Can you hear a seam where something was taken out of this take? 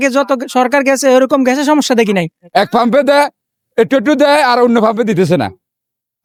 no; 0 cuts

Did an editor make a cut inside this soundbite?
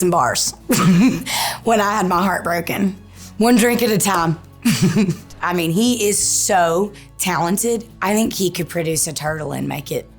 yes; 3 cuts; at 3.0 s, 5.3 s, 7.9 s

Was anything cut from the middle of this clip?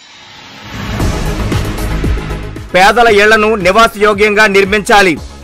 no; 0 cuts

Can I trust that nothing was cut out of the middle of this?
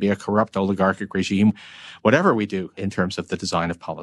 no; 2 cuts; at 1.5 s, 2.8 s

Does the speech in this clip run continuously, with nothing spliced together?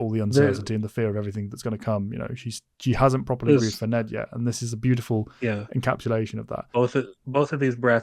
no; 1 cut; at 6.7 s

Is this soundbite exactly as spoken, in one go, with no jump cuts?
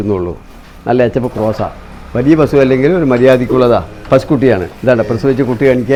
yes; 0 cuts

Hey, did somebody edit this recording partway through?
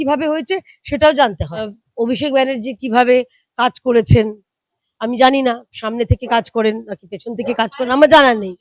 yes; 1 cut; at 1.8 s

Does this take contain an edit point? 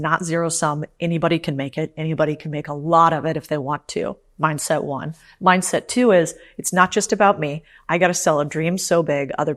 no; 0 cuts

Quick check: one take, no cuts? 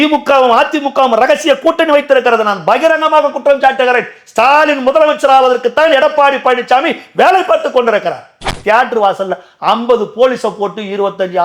no; 1 cut; at 8.5 s

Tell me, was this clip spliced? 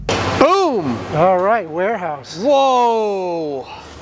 no; 0 cuts

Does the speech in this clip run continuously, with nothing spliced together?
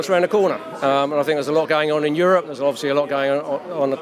yes; 0 cuts

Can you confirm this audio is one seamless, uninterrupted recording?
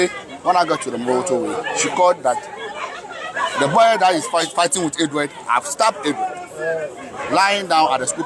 yes; 0 cuts

